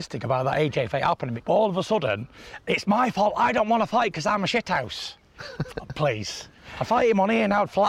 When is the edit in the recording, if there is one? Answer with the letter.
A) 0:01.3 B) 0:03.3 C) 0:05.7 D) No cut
A